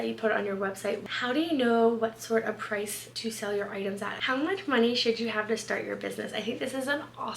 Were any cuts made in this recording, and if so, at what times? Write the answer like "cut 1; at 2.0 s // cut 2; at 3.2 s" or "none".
cut 1; at 1.1 s // cut 2; at 4.3 s